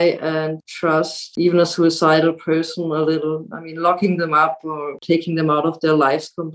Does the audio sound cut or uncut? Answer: cut